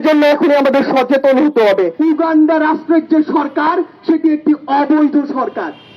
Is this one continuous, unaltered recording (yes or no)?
no